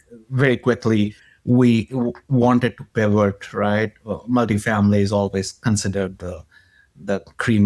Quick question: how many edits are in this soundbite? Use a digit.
0